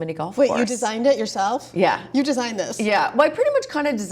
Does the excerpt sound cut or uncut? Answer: uncut